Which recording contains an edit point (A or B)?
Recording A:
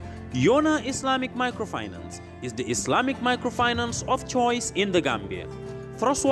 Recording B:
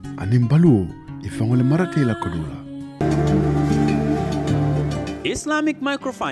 B